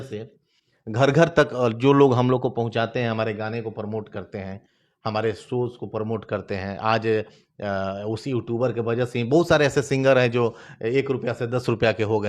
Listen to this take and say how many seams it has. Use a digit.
0